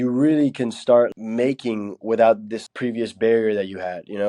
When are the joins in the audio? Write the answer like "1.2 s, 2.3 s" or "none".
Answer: 1.1 s, 2.5 s